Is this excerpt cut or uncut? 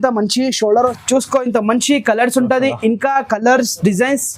cut